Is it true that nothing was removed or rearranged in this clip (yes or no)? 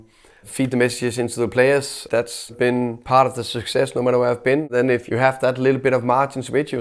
no